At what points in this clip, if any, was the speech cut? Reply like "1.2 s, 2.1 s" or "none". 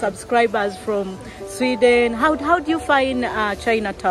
2.8 s